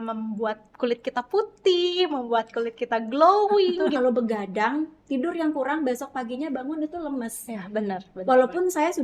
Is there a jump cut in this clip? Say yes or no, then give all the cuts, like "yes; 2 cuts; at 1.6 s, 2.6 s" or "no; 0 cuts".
yes; 1 cut; at 4.0 s